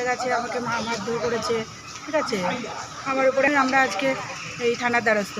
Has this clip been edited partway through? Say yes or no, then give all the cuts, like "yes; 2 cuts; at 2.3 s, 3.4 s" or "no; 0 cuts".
yes; 1 cut; at 3.5 s